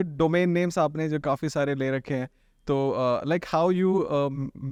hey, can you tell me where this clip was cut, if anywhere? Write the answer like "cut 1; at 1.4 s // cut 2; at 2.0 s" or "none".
none